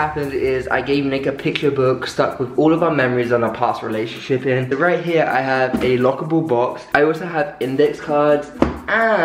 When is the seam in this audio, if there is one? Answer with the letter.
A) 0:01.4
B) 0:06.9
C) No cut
C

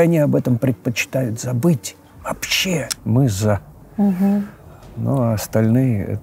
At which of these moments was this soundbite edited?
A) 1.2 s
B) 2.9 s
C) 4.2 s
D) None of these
B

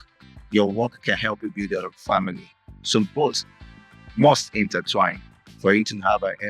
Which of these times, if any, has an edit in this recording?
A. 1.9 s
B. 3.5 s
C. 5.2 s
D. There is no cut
D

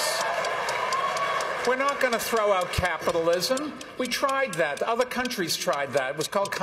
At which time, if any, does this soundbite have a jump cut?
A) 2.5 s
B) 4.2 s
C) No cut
C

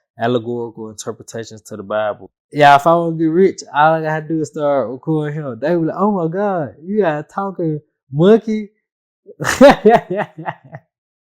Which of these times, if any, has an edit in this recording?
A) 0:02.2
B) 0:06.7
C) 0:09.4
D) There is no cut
A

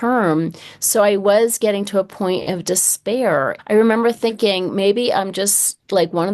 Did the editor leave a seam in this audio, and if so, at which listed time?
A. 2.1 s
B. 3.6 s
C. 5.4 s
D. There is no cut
B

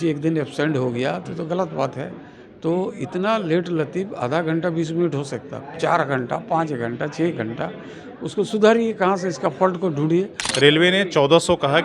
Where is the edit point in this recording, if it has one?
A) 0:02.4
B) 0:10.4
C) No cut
B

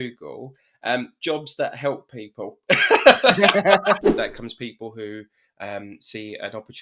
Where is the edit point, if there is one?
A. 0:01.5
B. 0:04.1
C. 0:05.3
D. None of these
B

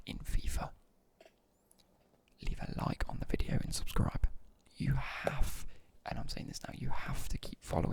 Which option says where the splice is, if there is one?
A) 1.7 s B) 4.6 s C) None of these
B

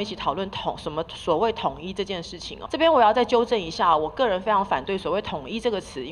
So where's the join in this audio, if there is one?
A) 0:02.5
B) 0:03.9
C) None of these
A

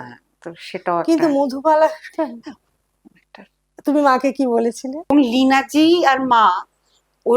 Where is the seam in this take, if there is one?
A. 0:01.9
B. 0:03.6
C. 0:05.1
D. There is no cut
C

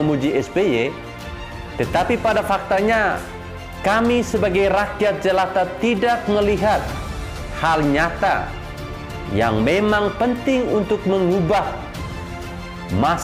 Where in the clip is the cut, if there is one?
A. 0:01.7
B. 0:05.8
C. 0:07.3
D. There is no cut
D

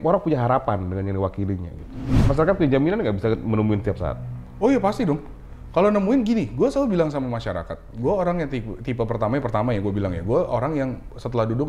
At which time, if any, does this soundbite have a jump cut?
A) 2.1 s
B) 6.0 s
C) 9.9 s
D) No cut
A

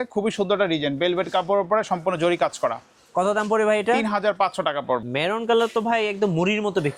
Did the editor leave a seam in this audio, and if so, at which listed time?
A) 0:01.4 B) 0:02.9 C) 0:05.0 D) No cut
C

